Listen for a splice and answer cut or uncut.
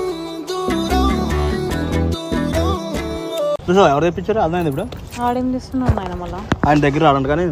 uncut